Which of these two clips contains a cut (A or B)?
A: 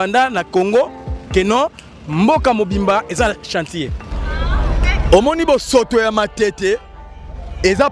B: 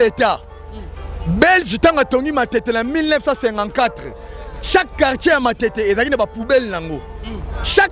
A